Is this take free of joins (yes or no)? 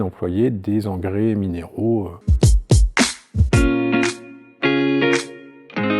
no